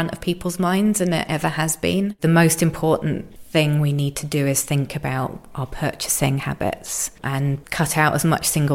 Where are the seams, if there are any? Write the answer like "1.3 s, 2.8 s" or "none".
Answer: 2.2 s, 7.2 s